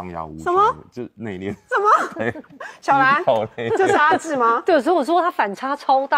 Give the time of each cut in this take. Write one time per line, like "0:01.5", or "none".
none